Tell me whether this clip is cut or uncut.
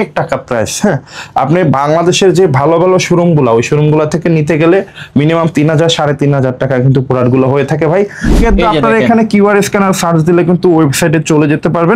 cut